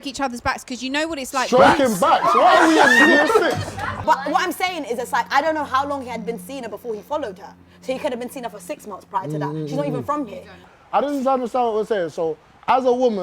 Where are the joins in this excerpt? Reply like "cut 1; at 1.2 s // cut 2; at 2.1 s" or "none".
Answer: cut 1; at 4.0 s // cut 2; at 10.6 s